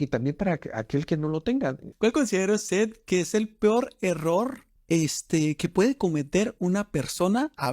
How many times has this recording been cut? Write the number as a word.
two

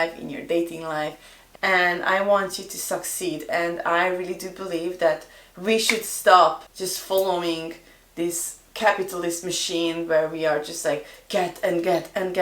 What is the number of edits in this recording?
one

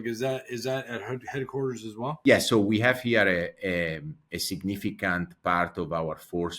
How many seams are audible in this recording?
one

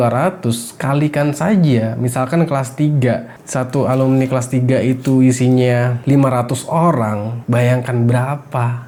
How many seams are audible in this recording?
zero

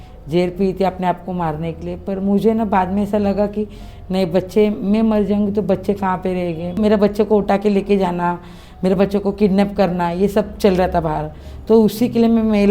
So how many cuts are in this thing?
one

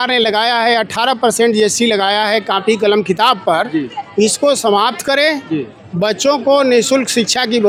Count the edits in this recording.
zero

